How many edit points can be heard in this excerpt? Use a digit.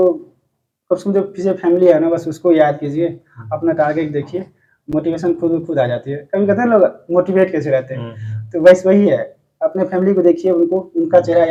0